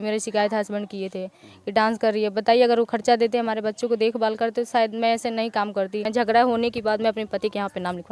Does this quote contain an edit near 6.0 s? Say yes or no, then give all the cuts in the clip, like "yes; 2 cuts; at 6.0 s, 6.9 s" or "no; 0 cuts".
yes; 1 cut; at 6.0 s